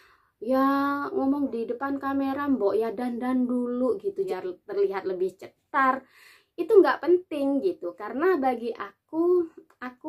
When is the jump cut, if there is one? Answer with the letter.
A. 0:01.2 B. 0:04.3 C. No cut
B